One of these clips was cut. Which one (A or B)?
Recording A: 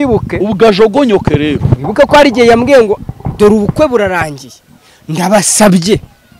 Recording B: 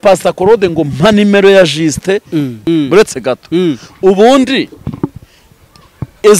B